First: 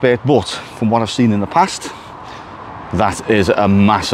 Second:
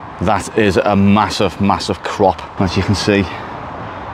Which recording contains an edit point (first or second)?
second